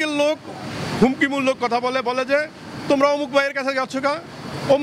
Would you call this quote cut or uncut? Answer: uncut